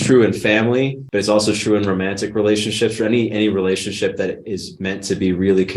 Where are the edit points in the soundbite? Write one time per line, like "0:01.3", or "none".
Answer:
0:01.0